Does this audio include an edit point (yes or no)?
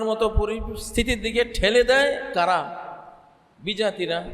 no